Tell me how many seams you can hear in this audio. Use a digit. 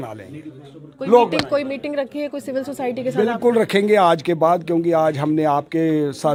0